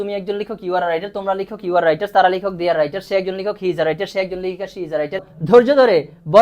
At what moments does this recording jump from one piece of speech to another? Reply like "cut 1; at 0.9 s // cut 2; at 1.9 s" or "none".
cut 1; at 5.3 s